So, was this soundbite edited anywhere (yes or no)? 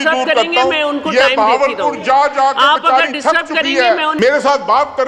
yes